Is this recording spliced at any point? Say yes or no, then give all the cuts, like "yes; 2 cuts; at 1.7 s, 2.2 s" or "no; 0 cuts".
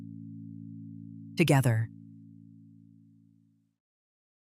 yes; 1 cut; at 1.0 s